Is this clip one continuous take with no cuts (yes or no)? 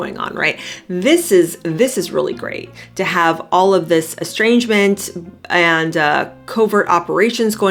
yes